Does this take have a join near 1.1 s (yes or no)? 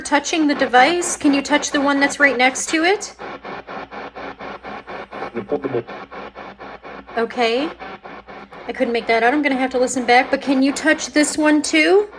no